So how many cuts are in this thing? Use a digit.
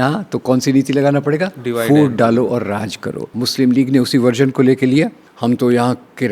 2